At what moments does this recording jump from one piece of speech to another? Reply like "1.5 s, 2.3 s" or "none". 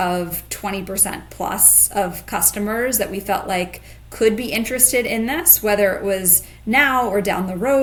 none